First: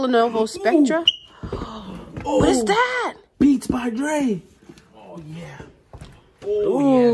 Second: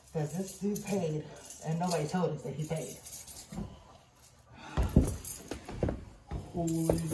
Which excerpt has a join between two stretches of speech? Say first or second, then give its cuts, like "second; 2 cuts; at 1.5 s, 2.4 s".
first; 1 cut; at 5.0 s